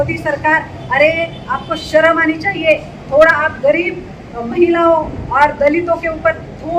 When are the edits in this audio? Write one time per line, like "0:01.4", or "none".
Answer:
none